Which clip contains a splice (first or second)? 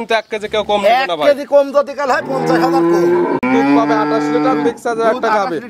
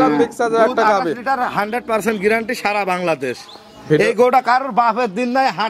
first